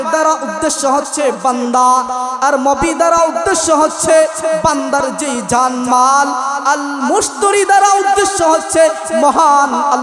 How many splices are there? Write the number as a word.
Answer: zero